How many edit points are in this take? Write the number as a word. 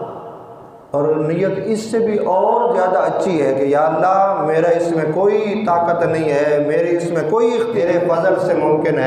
one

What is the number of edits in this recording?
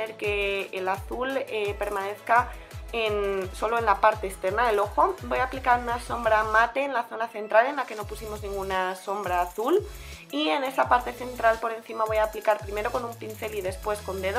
zero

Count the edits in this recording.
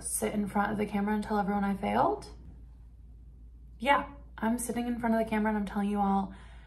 one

